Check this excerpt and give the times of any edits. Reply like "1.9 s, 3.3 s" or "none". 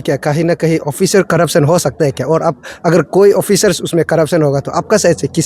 none